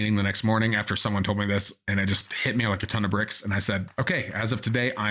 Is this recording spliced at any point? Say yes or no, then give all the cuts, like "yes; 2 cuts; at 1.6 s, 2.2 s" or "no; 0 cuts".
no; 0 cuts